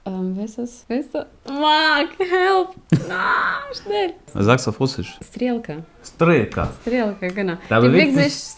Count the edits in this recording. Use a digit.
1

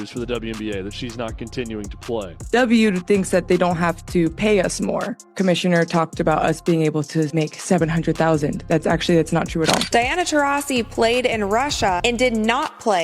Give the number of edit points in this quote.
3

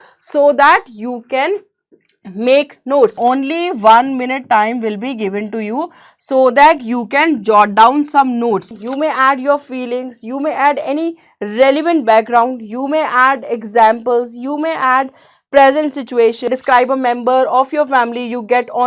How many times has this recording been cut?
3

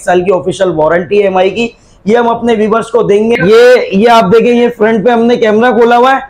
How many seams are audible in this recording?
1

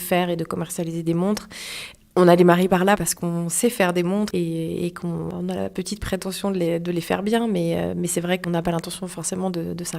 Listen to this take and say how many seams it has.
4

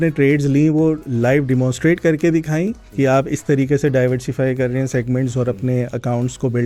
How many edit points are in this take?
0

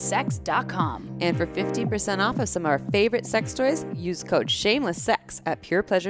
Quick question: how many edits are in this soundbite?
0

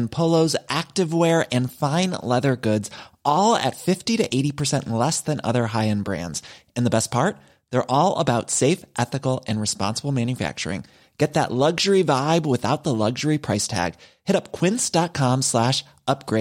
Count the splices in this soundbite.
0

